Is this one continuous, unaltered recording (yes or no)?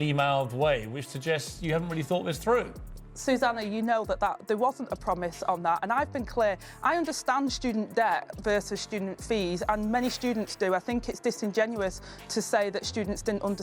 no